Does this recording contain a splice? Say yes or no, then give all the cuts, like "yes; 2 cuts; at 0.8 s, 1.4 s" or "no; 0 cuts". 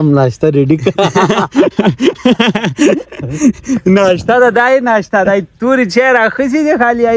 no; 0 cuts